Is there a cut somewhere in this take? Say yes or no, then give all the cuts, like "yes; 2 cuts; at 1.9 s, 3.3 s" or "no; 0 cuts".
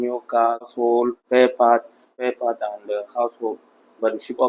yes; 2 cuts; at 0.8 s, 2.1 s